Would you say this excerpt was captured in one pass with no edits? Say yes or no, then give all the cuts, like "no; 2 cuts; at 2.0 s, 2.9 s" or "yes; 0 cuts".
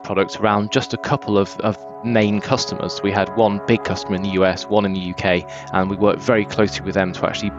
yes; 0 cuts